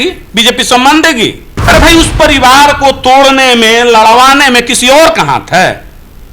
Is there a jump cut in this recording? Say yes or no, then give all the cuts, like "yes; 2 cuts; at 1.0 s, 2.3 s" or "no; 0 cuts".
yes; 1 cut; at 1.5 s